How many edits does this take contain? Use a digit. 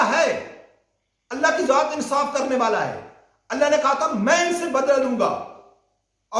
0